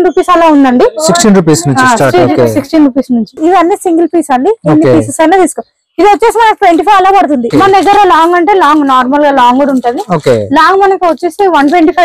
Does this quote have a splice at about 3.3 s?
yes; 2 cuts; at 3.3 s, 7.5 s

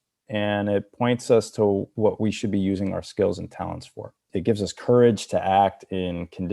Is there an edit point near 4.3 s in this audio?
yes; 2 cuts; at 1.9 s, 4.3 s

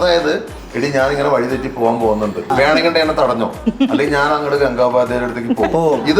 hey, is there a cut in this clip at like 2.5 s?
yes; 1 cut; at 2.5 s

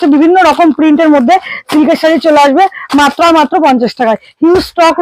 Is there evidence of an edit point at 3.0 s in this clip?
no; 0 cuts

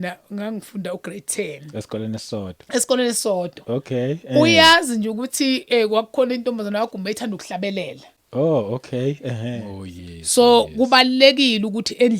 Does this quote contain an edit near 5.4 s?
no; 1 cut; at 9.7 s

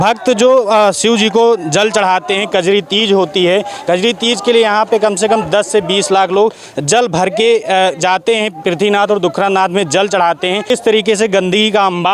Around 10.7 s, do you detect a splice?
yes; 1 cut; at 10.7 s

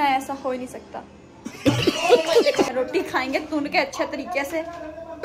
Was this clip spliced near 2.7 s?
yes; 1 cut; at 2.7 s

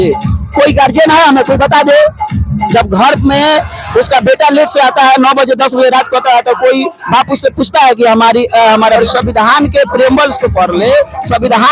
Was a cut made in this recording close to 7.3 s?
no; 1 cut; at 9.0 s

